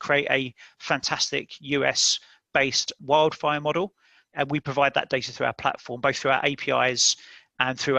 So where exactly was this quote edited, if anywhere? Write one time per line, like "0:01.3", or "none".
0:03.0
0:04.3